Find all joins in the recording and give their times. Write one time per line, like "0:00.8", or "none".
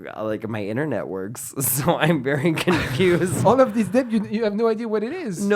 0:03.4